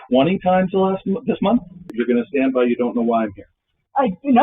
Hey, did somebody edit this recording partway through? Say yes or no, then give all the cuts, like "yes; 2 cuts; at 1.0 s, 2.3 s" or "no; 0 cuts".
yes; 1 cut; at 2.0 s